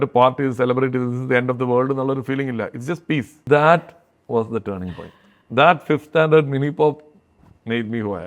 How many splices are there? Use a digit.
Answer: 1